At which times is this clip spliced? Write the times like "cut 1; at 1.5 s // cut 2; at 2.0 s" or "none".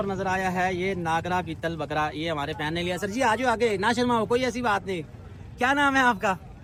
none